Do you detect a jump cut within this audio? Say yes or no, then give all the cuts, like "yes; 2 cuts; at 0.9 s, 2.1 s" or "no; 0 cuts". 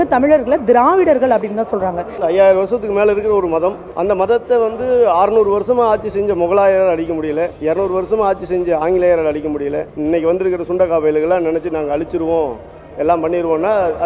yes; 4 cuts; at 2.2 s, 3.9 s, 7.6 s, 9.9 s